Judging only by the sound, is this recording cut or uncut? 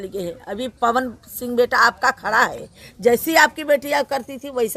uncut